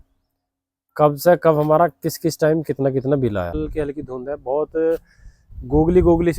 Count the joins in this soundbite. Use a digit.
1